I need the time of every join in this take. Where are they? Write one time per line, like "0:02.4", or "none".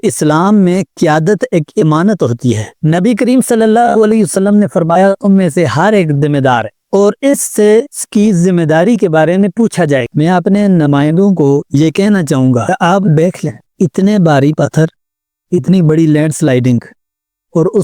0:10.1